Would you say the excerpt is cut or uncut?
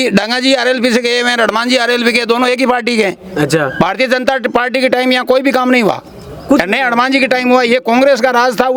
uncut